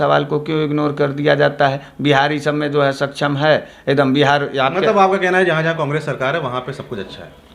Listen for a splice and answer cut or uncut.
uncut